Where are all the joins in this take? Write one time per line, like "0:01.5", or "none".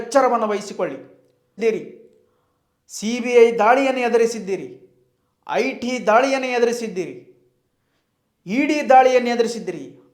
0:01.6